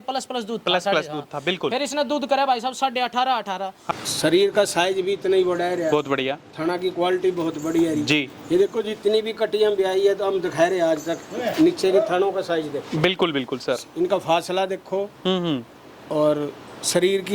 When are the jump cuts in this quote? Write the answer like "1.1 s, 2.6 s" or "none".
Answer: 3.8 s